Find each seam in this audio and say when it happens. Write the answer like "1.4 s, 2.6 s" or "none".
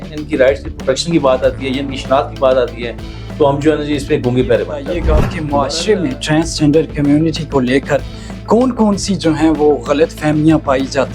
4.9 s